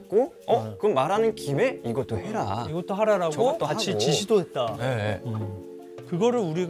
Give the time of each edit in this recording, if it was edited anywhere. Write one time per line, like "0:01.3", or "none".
0:05.3